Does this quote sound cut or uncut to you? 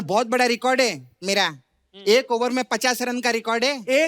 uncut